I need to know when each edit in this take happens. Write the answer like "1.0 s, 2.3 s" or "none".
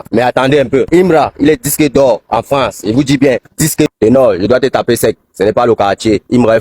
3.9 s